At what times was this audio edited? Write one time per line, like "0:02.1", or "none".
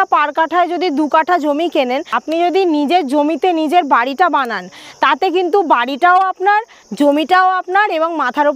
0:02.2